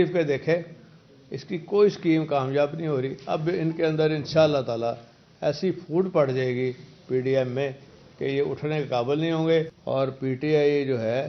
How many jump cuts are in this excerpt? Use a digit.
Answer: 1